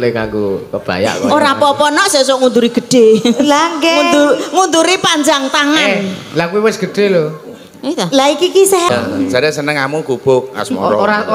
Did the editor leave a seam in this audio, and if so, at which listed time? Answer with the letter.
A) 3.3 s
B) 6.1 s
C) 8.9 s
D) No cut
C